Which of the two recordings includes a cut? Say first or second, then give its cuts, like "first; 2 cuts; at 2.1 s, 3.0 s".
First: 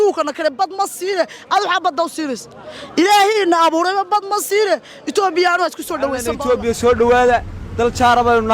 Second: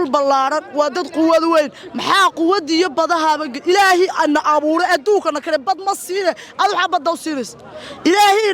first; 1 cut; at 6.3 s